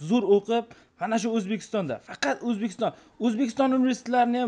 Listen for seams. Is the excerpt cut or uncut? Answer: uncut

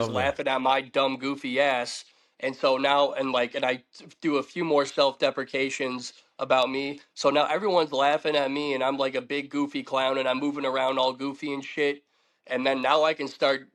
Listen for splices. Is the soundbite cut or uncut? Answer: uncut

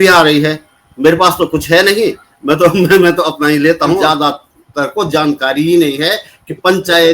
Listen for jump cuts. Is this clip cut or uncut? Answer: cut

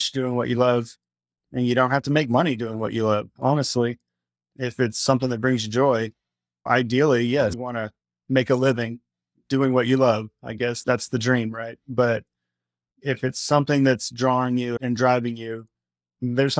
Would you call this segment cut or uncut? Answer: uncut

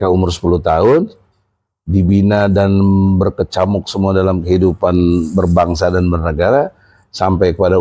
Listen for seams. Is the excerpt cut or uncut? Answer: uncut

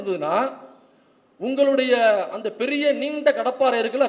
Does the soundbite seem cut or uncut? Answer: uncut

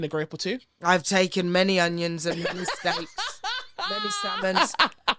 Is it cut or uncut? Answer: uncut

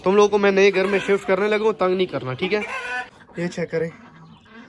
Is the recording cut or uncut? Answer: uncut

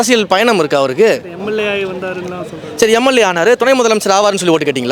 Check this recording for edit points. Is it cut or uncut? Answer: uncut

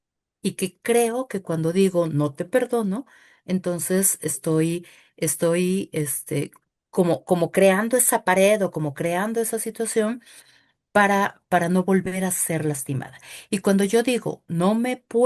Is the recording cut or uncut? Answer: uncut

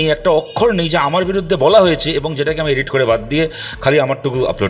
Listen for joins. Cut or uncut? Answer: uncut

